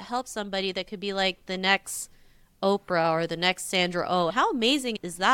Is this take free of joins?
yes; 0 cuts

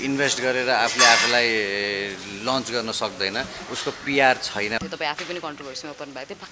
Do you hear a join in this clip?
yes; 1 cut; at 4.8 s

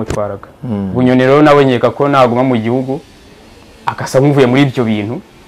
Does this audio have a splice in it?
no; 0 cuts

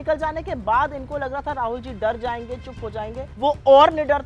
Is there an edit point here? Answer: yes; 1 cut; at 3.2 s

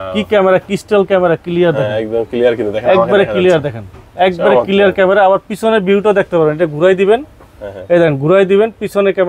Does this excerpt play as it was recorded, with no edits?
yes; 0 cuts

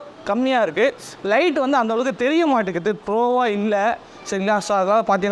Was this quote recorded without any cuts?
yes; 0 cuts

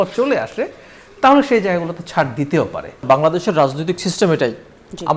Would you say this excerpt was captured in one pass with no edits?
no; 1 cut; at 3.0 s

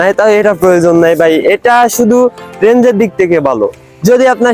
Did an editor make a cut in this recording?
no; 0 cuts

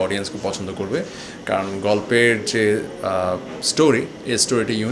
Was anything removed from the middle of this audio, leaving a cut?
no; 0 cuts

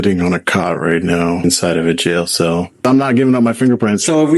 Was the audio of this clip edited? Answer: yes; 2 cuts; at 1.4 s, 2.8 s

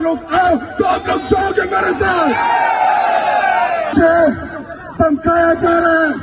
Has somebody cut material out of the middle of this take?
yes; 1 cut; at 3.9 s

